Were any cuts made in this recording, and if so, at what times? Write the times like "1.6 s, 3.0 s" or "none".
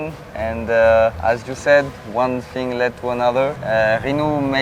1.2 s, 3.6 s